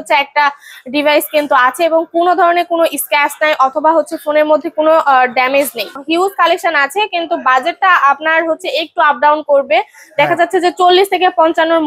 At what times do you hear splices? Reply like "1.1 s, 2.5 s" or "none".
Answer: 6.0 s